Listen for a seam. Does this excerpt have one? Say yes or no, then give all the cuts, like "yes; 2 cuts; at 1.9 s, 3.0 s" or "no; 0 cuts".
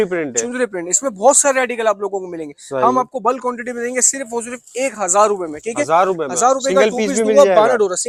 no; 0 cuts